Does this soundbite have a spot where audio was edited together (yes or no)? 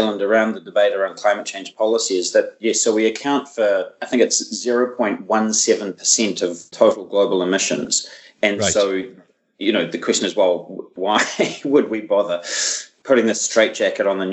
yes